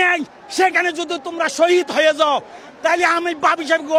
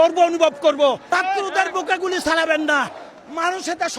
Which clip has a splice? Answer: second; 1 cut; at 1.0 s

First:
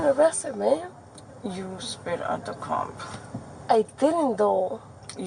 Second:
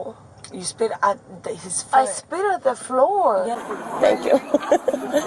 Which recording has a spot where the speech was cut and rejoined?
second; 1 cut; at 3.6 s

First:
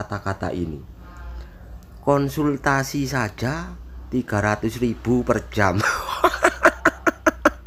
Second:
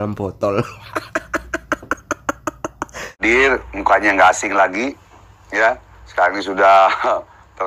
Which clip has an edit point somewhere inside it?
second; 1 cut; at 3.2 s

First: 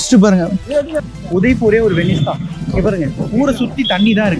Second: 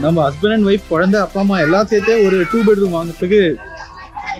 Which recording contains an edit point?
first; 1 cut; at 1.0 s

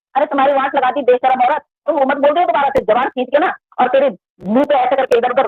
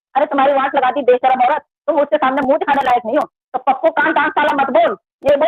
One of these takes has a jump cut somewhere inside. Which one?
first; 1 cut; at 2.0 s

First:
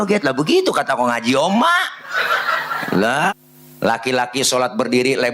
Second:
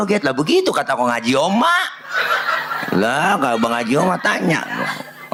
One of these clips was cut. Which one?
first; 1 cut; at 3.3 s

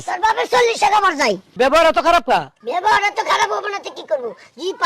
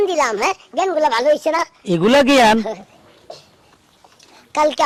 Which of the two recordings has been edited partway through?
first; 2 cuts; at 1.5 s, 2.6 s

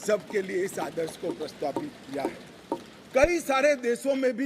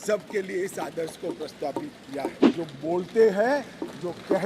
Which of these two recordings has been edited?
second; 1 cut; at 2.4 s

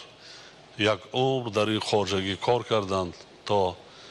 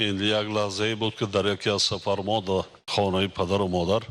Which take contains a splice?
second; 1 cut; at 2.8 s

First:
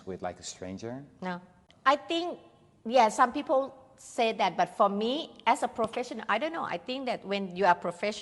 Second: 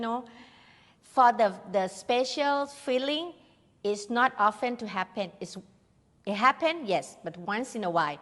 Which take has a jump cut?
first; 1 cut; at 1.6 s

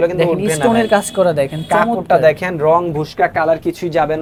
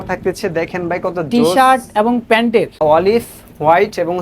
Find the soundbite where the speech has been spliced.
second; 1 cut; at 2.8 s

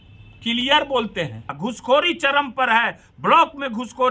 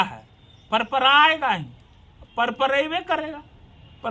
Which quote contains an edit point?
first; 1 cut; at 1.6 s

